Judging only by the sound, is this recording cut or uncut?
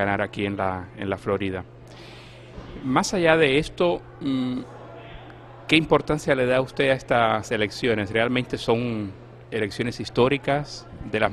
uncut